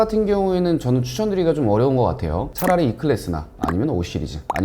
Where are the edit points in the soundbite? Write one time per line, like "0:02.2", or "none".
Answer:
0:02.5